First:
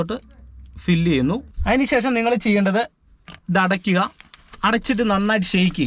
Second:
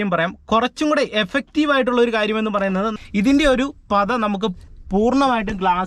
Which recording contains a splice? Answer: second; 1 cut; at 2.9 s

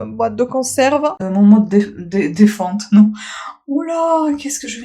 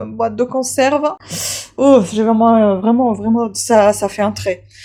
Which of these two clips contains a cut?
first; 1 cut; at 1.2 s

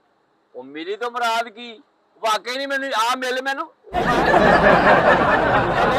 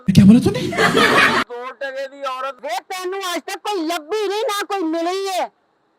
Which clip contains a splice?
second; 1 cut; at 2.6 s

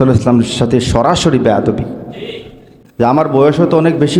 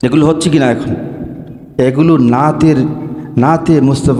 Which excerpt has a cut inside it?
first; 1 cut; at 2.8 s

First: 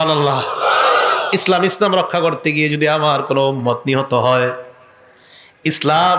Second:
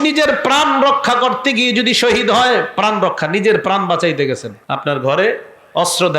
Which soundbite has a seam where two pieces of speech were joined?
second; 1 cut; at 4.5 s

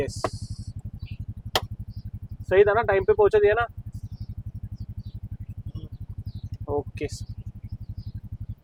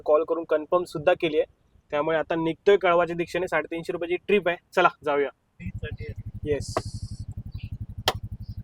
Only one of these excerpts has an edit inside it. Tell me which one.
second; 1 cut; at 5.5 s

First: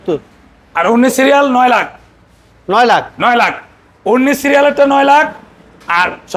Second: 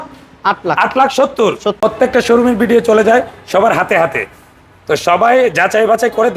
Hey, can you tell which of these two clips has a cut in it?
second; 1 cut; at 1.8 s

